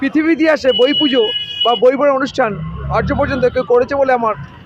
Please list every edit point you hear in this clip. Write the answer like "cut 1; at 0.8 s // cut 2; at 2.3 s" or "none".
none